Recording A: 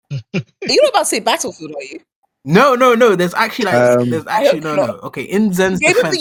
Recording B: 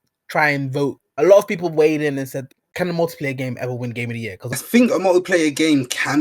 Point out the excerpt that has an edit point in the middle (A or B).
B